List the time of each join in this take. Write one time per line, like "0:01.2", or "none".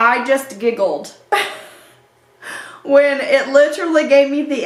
none